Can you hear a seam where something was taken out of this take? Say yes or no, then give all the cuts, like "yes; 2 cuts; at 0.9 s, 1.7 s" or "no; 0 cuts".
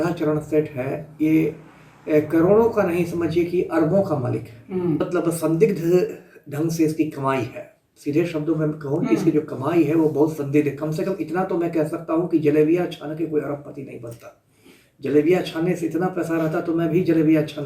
yes; 1 cut; at 5.0 s